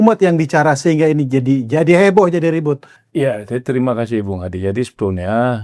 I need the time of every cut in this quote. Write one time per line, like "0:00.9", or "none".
0:02.9